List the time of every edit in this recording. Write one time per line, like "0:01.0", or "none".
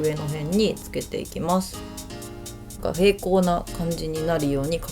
0:02.2